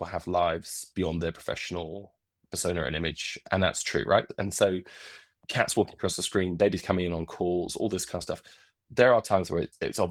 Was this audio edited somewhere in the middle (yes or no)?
no